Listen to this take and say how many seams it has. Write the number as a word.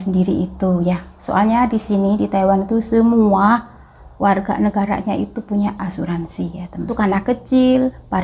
one